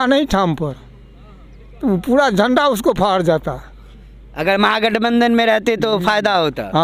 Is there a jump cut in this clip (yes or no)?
no